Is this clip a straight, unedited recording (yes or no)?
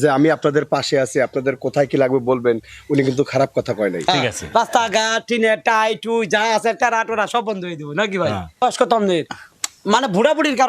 no